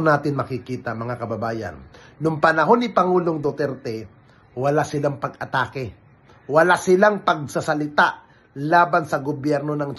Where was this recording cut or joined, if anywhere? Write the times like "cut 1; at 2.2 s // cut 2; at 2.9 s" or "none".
none